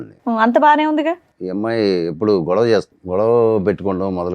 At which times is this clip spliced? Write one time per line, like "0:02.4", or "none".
0:01.3
0:03.0

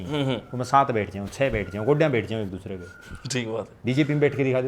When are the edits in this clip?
none

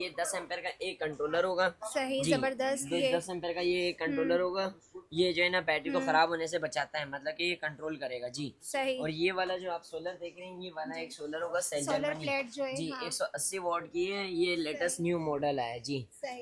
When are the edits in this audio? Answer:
none

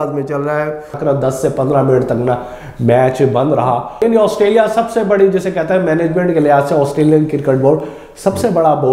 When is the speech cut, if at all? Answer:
0:00.9
0:04.0

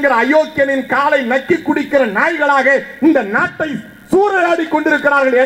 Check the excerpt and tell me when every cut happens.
none

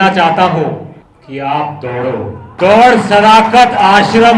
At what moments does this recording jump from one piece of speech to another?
0:02.5

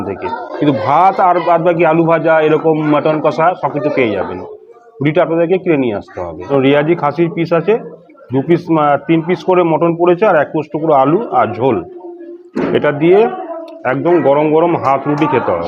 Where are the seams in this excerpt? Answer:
0:06.5

